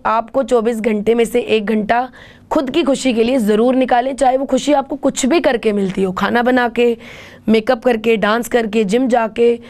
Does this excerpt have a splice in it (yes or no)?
no